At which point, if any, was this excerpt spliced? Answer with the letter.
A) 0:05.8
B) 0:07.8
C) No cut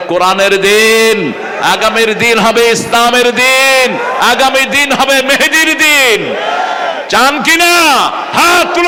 C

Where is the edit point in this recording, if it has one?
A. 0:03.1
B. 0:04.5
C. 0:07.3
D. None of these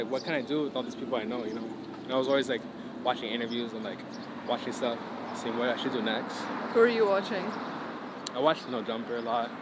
D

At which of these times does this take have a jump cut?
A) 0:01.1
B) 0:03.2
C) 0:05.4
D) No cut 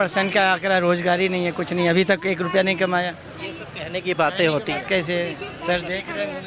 D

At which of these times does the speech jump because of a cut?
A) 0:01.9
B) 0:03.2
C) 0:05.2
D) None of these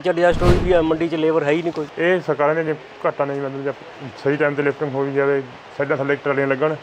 A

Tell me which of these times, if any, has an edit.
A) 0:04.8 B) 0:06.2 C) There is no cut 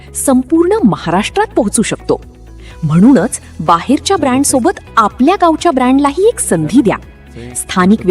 C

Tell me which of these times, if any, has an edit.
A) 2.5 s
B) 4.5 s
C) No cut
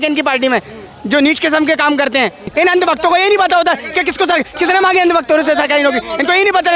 A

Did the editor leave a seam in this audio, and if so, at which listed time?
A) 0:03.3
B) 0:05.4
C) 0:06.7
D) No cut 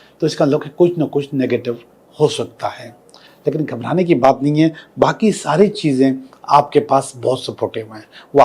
D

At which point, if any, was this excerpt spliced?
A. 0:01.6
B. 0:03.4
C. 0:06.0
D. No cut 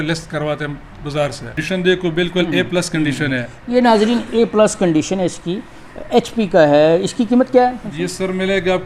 A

